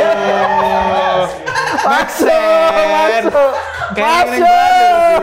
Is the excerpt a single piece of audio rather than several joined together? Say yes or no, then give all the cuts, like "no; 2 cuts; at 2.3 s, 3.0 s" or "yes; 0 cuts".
yes; 0 cuts